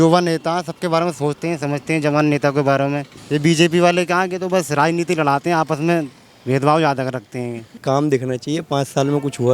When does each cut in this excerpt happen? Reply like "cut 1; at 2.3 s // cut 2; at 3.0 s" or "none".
cut 1; at 3.1 s // cut 2; at 7.7 s

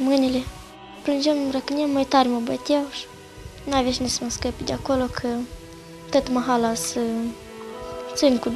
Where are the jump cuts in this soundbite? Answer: cut 1; at 7.3 s

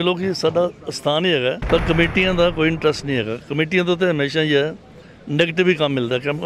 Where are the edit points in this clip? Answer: cut 1; at 1.6 s

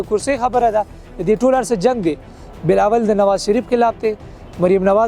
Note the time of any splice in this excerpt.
none

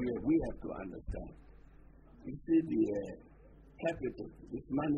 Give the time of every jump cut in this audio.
none

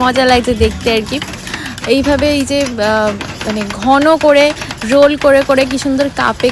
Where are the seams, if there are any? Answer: none

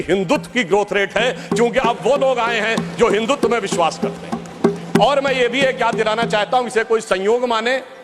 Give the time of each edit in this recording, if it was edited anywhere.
none

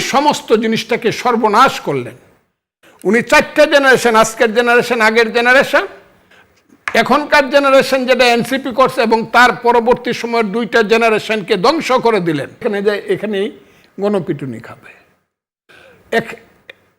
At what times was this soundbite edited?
cut 1; at 12.6 s

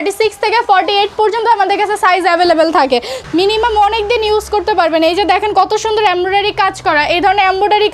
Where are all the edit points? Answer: cut 1; at 3.2 s

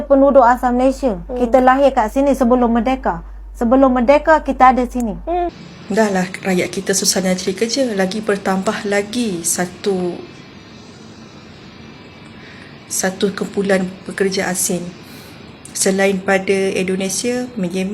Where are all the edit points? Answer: cut 1; at 5.7 s

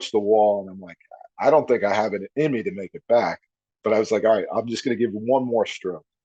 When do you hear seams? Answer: none

